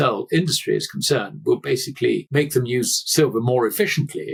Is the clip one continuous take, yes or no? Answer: yes